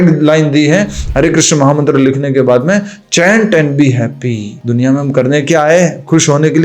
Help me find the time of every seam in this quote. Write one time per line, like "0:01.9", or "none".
0:04.5